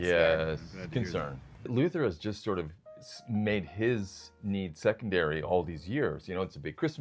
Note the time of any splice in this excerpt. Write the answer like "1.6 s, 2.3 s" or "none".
1.5 s